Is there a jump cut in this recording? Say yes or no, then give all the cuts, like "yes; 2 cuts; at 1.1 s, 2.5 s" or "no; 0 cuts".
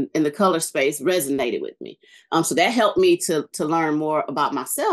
no; 0 cuts